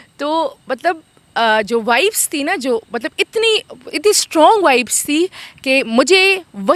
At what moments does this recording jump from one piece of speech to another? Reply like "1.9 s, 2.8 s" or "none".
none